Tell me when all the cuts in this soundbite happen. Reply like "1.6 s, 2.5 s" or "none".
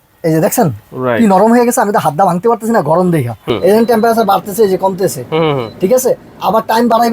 3.5 s